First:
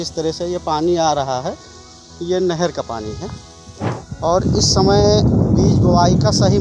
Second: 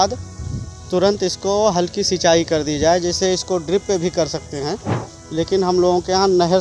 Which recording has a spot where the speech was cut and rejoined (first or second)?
first